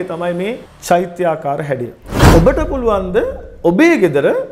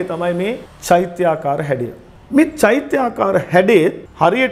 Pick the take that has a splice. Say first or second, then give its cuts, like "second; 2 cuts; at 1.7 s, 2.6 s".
first; 1 cut; at 2.2 s